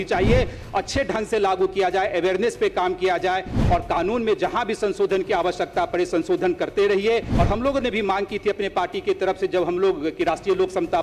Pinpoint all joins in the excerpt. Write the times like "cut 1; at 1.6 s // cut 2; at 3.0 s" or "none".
cut 1; at 7.3 s

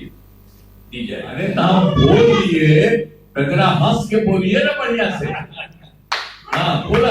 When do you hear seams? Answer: cut 1; at 1.4 s

